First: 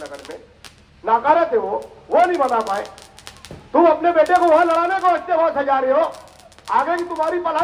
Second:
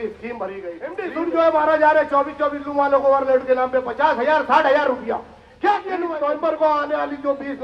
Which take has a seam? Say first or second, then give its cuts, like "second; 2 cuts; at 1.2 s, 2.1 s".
second; 2 cuts; at 1.0 s, 6.1 s